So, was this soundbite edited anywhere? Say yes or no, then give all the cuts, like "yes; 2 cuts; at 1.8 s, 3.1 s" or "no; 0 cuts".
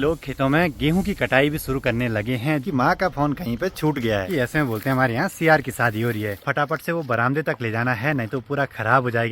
yes; 3 cuts; at 2.6 s, 4.3 s, 6.4 s